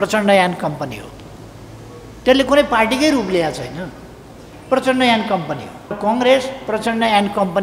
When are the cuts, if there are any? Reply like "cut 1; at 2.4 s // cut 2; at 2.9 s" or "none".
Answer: cut 1; at 6.0 s